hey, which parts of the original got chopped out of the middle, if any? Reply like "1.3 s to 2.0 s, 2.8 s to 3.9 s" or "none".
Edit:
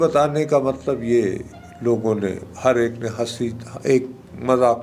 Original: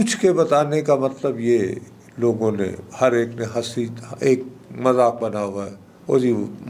none

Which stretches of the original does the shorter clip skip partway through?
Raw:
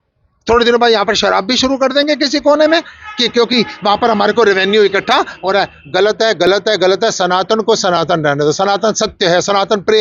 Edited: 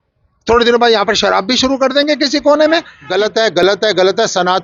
3.0 s to 5.8 s

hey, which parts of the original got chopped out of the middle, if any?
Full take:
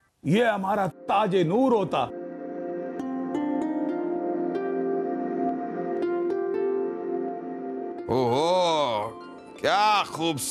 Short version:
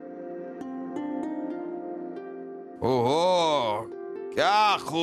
5.1 s to 8.0 s

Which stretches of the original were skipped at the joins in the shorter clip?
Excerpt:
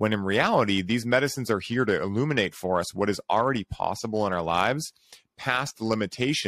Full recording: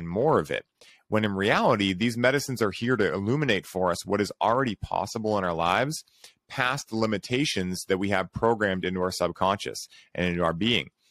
none

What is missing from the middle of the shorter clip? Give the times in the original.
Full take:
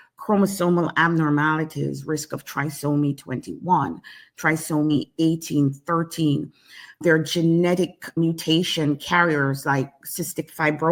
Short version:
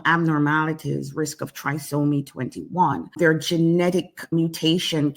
4.0 s to 6.9 s

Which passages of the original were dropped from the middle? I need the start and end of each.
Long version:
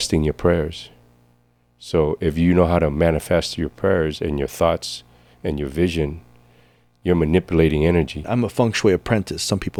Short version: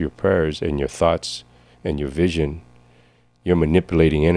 none

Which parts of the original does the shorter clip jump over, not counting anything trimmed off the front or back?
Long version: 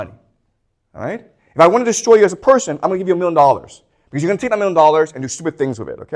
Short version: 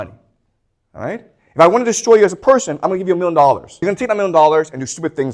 3.7 s to 4.1 s

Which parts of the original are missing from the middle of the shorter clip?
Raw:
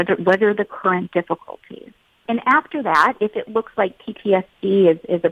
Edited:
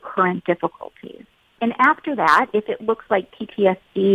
none

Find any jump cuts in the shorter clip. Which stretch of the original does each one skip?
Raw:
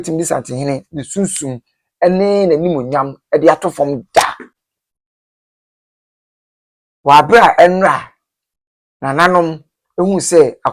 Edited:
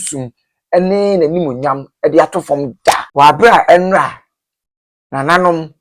4.3 s to 6.9 s

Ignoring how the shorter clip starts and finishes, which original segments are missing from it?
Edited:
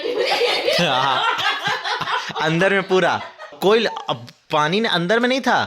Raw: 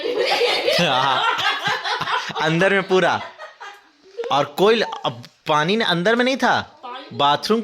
3.6 s to 4.5 s

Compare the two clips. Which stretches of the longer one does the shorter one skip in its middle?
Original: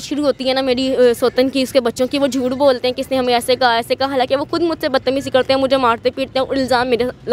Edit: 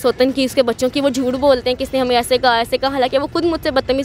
none

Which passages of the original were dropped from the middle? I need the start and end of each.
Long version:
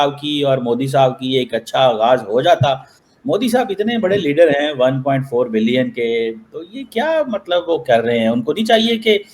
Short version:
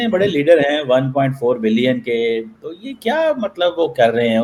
none

